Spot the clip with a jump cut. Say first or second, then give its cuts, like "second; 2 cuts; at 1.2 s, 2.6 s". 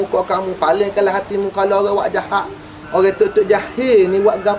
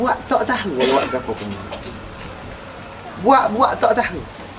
second; 1 cut; at 1.8 s